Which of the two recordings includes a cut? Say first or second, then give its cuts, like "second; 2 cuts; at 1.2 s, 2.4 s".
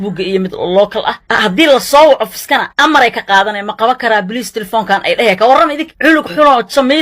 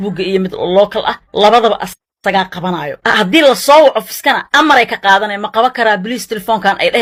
first; 1 cut; at 1.2 s